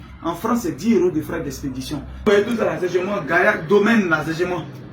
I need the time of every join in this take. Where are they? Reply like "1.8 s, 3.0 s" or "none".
2.2 s

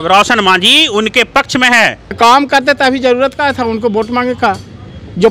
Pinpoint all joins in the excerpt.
2.1 s

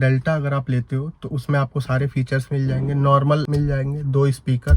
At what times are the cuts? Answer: 3.5 s

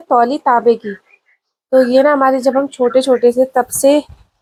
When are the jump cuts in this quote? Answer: none

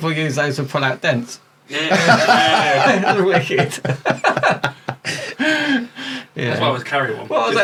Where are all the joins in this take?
none

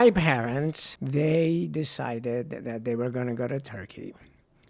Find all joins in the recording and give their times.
0.9 s

